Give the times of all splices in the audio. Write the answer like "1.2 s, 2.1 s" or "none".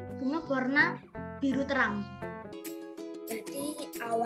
2.5 s